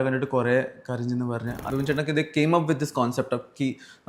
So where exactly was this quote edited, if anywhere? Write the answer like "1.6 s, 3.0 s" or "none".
1.6 s